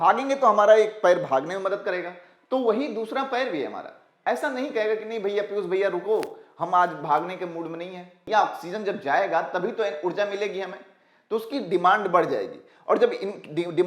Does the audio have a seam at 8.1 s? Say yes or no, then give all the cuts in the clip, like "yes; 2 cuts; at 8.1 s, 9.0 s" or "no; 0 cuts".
yes; 1 cut; at 8.1 s